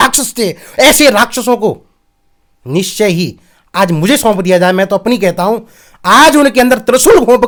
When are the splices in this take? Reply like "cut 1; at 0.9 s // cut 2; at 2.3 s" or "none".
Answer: none